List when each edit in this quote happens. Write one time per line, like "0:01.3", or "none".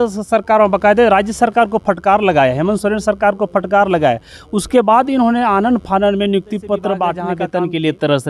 0:07.3